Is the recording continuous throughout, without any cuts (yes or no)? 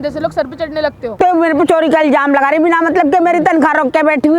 no